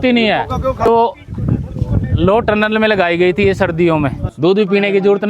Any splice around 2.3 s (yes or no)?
no